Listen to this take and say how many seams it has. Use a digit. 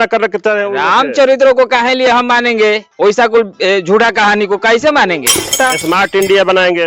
1